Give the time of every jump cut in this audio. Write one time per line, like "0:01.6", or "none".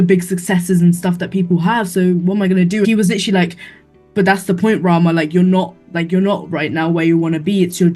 0:02.8